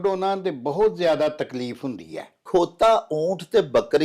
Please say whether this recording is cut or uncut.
cut